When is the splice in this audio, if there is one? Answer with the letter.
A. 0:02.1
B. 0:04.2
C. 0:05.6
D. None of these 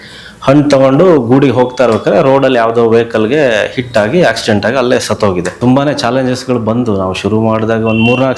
C